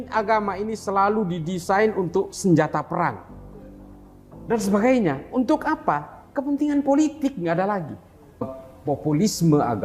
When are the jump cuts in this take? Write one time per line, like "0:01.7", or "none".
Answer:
0:08.5